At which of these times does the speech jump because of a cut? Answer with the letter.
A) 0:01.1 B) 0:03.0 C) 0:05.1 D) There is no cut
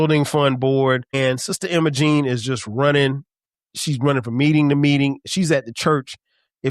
A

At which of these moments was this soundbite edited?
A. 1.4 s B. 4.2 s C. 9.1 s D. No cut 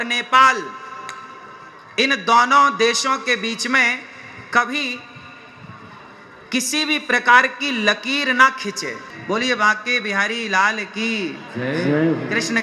C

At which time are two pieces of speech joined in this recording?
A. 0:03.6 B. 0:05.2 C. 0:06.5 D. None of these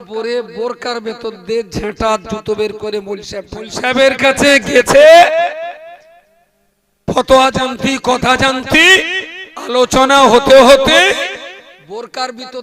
A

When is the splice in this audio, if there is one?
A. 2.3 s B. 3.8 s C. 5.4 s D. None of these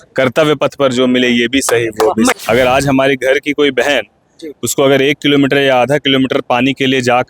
A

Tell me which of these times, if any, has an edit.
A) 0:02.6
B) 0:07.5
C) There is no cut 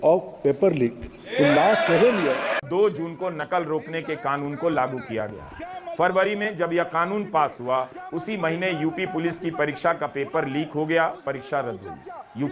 A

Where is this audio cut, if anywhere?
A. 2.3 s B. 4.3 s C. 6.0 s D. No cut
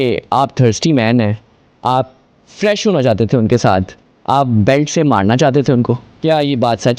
C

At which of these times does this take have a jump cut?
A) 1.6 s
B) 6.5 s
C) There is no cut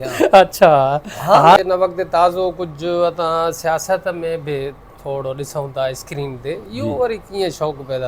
A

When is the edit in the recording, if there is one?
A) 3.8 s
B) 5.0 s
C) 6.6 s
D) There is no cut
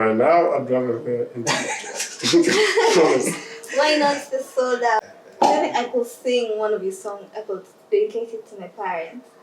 B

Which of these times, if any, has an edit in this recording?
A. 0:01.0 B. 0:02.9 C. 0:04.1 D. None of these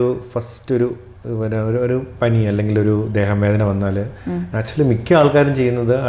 D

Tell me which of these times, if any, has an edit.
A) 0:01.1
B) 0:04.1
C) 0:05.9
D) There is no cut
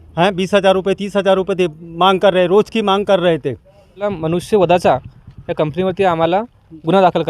B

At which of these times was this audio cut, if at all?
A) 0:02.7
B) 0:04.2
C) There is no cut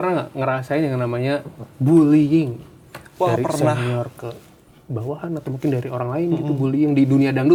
C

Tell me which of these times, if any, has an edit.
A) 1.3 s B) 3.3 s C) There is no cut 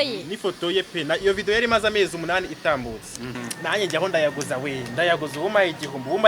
B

